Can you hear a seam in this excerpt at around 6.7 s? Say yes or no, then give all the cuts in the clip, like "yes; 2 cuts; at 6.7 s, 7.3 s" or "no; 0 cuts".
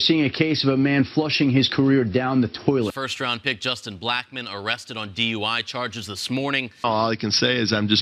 yes; 2 cuts; at 3.0 s, 6.7 s